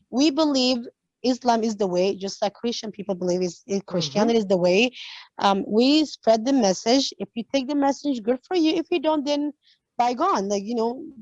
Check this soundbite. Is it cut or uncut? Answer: uncut